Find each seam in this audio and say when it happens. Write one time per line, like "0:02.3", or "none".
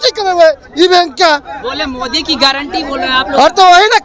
none